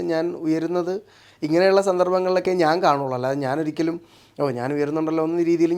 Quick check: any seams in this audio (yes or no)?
no